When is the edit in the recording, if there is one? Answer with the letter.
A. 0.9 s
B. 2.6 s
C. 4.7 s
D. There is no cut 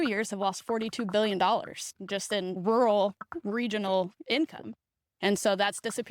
B